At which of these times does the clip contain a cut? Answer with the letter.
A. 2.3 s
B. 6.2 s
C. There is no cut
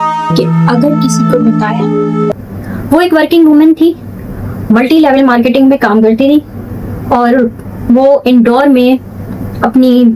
A